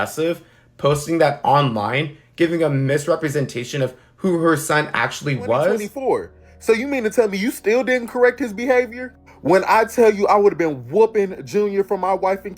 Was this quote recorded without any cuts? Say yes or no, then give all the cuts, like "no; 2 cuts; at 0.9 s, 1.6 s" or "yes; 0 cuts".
no; 1 cut; at 5.9 s